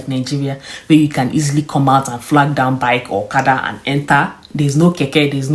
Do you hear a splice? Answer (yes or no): no